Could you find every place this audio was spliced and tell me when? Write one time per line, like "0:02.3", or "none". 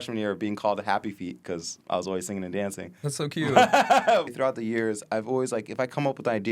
0:04.2